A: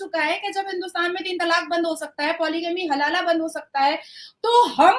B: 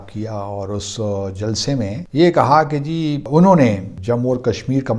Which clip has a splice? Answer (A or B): B